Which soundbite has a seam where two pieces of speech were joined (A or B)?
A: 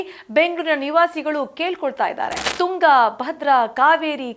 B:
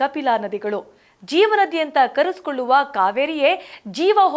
A